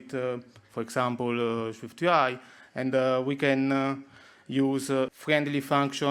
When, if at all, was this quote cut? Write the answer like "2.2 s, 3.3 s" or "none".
5.1 s